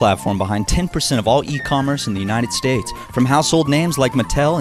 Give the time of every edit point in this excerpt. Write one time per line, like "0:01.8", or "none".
none